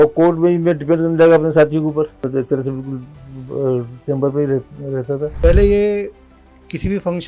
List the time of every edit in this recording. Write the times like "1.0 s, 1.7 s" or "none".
2.2 s, 5.3 s